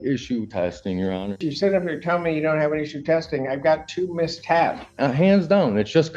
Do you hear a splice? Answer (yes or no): yes